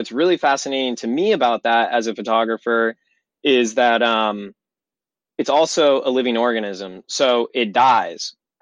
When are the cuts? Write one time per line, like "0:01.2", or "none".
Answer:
none